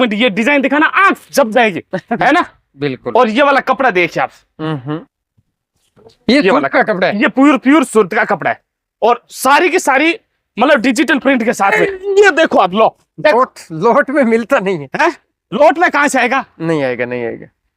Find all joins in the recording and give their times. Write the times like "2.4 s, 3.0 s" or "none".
2.2 s, 11.8 s